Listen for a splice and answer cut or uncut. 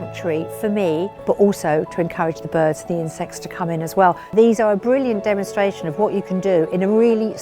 cut